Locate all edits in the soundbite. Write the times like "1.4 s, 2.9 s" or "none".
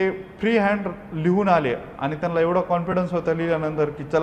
none